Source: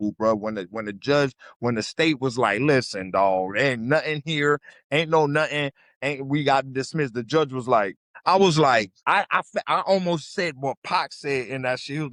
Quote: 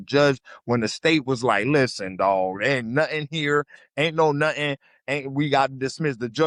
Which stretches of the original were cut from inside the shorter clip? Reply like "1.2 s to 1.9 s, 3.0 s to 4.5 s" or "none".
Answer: none